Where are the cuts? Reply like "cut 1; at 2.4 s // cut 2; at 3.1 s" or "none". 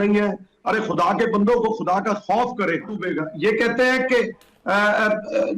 cut 1; at 3.1 s